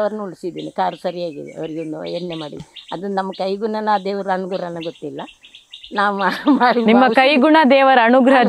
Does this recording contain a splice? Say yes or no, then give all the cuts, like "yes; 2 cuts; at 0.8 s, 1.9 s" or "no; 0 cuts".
no; 0 cuts